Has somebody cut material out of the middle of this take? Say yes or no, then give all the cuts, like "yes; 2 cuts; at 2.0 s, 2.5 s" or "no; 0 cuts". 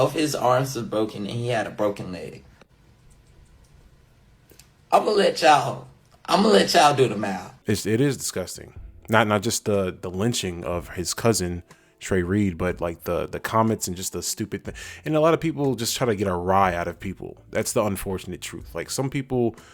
yes; 1 cut; at 7.5 s